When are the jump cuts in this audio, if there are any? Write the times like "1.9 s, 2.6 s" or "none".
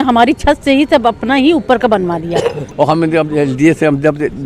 2.6 s